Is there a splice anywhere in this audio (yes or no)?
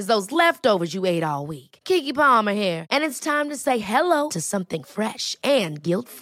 no